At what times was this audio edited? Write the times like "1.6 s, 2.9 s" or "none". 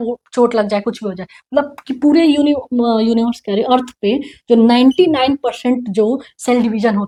none

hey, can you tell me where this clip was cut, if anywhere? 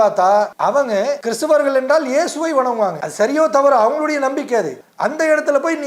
0.9 s, 3.0 s, 4.8 s

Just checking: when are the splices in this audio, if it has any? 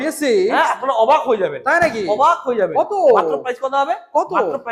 none

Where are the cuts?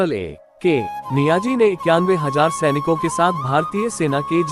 1.0 s

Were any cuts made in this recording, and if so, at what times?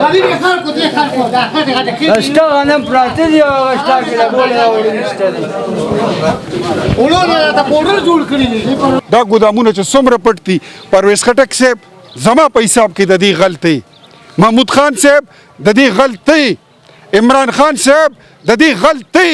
9.0 s

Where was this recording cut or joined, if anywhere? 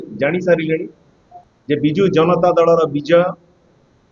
2.0 s

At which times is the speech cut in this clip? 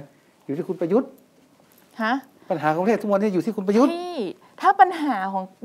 none

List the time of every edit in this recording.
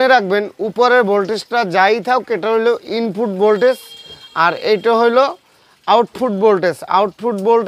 none

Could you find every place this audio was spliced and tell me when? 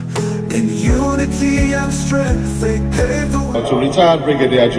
3.5 s

